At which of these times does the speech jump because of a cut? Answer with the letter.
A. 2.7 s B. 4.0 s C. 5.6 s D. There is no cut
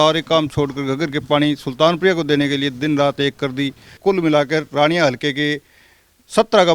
B